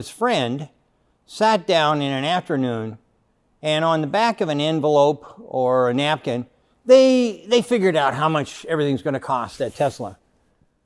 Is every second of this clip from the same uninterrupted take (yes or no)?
yes